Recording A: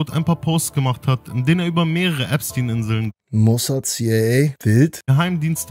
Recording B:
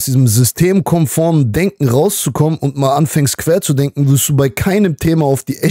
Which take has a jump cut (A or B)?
A